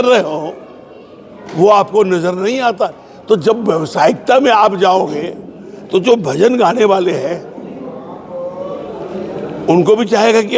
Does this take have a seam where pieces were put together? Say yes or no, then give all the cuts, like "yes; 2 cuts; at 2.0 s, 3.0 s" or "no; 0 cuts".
no; 0 cuts